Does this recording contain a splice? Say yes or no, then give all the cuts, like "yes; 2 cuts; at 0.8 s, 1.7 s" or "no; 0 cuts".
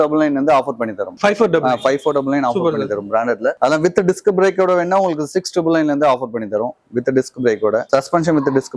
no; 0 cuts